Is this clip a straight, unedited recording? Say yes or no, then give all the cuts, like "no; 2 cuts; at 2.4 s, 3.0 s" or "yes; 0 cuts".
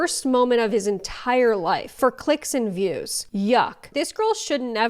no; 1 cut; at 3.8 s